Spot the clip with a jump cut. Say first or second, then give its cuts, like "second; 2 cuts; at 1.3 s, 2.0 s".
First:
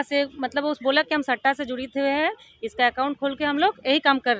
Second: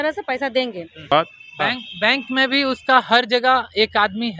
second; 1 cut; at 1.1 s